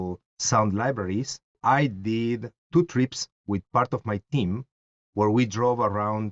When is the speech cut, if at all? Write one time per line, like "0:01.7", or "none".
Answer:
0:01.5
0:02.6